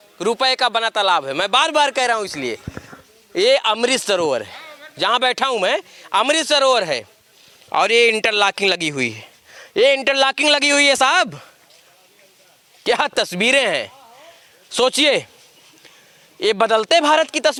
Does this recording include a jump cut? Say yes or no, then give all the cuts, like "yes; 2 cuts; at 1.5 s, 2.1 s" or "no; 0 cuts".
no; 0 cuts